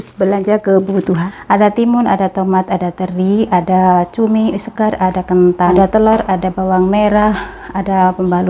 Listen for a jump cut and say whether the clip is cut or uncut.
cut